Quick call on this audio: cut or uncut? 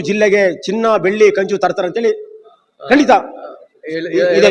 uncut